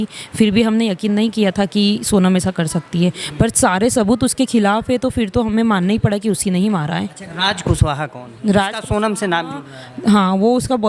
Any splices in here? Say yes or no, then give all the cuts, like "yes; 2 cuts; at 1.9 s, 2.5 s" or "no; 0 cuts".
yes; 1 cut; at 7.2 s